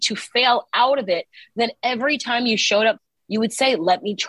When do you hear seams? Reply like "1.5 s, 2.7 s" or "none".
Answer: 3.1 s